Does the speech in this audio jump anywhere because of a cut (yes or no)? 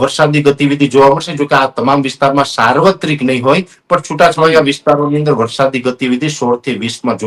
no